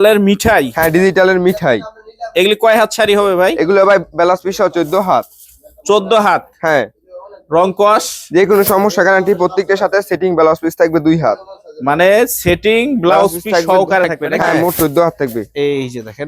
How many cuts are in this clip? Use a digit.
1